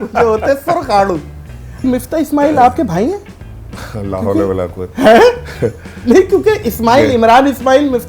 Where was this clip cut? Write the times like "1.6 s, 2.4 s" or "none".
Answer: 1.8 s